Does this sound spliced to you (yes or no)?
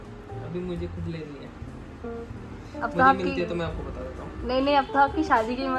no